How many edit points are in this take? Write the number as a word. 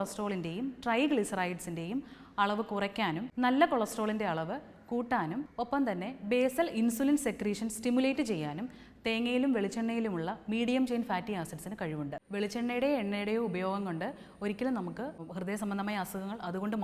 four